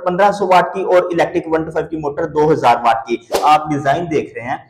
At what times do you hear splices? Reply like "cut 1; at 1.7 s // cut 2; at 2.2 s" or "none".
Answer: cut 1; at 3.4 s